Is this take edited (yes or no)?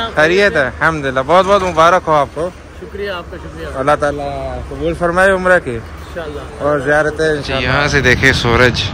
yes